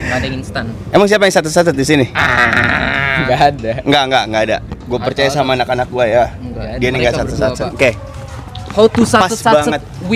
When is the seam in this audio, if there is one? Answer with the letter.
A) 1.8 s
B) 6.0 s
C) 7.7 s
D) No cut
C